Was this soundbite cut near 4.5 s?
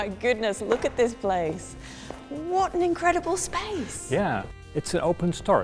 yes; 1 cut; at 4.5 s

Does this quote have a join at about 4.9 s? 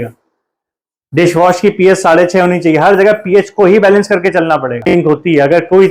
yes; 1 cut; at 4.9 s

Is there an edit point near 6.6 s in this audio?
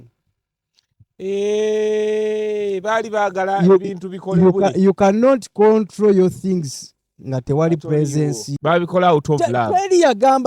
no; 1 cut; at 8.5 s

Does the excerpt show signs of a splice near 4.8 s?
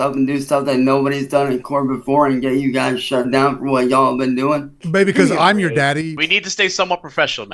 yes; 1 cut; at 4.8 s

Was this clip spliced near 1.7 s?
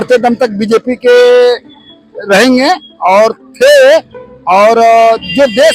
no; 0 cuts

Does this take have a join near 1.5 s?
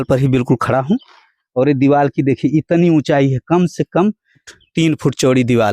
no; 1 cut; at 4.5 s

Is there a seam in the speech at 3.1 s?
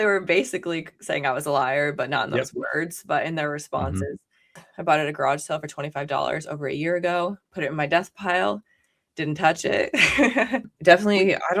no; 2 cuts; at 4.6 s, 10.7 s

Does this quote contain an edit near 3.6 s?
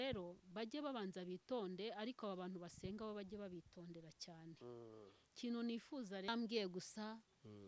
no; 1 cut; at 6.3 s

